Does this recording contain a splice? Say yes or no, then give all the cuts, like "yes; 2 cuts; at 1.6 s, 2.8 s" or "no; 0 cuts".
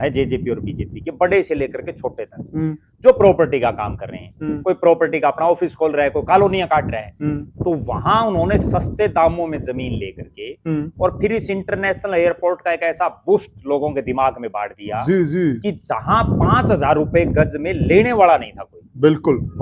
no; 0 cuts